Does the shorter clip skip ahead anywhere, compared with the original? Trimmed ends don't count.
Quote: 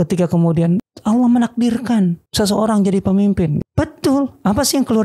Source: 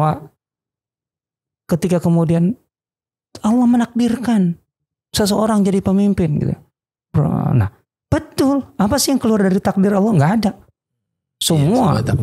yes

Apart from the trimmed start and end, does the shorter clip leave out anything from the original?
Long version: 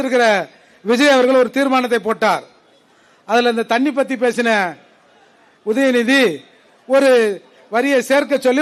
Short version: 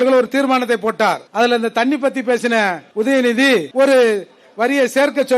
yes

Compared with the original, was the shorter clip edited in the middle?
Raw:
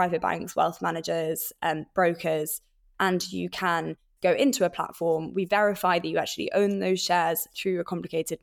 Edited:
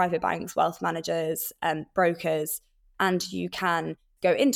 no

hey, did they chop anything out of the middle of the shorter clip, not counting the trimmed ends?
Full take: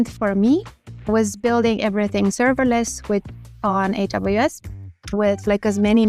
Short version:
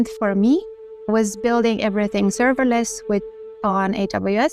no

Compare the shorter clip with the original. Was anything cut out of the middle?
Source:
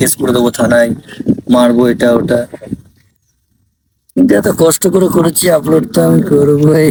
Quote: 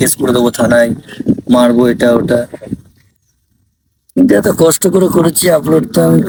no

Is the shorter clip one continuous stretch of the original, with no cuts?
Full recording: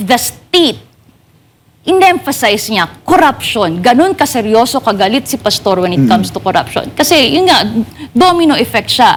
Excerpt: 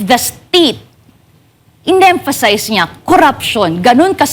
yes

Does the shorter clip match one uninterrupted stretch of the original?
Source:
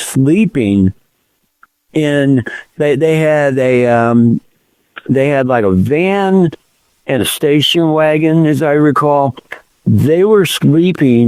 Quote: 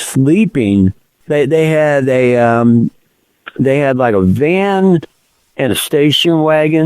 no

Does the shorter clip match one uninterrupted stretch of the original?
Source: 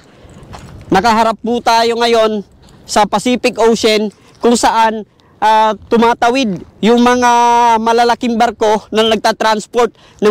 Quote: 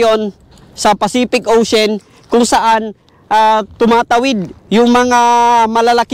yes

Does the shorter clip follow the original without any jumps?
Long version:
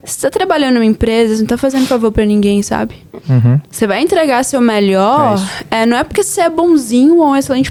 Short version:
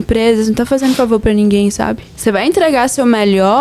no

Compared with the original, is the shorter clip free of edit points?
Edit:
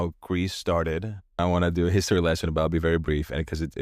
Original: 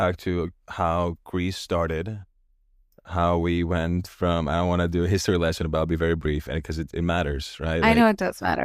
no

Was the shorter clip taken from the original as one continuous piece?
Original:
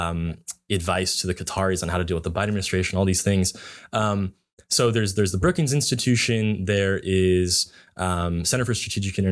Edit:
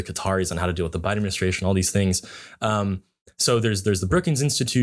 yes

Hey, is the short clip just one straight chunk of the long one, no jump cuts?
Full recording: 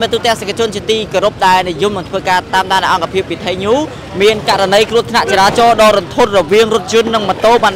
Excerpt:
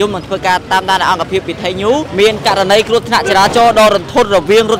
no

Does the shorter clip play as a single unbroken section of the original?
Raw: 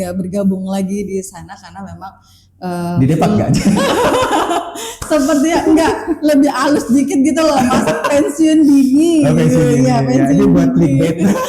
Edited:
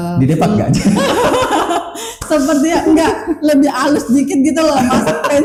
yes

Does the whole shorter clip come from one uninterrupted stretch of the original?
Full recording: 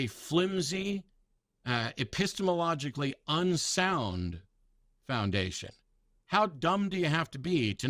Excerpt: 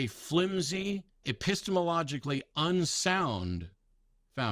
no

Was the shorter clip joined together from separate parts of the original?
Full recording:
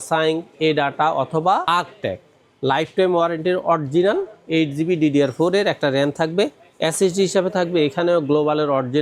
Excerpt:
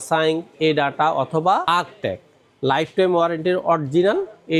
no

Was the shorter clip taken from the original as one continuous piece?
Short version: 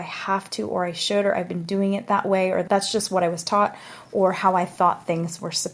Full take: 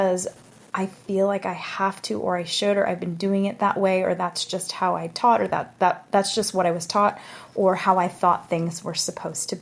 no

